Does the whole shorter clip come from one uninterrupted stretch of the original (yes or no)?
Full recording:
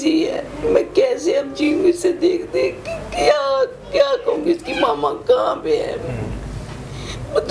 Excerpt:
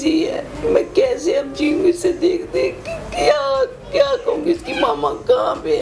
yes